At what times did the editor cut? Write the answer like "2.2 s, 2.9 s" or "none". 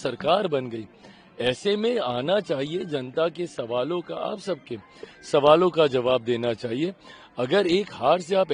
none

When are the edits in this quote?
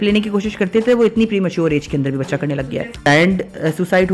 2.6 s

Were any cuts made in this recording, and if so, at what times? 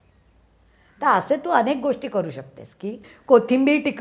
2.7 s

